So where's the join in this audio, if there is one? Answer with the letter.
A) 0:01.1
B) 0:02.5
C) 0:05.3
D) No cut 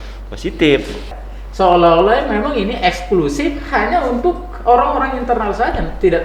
A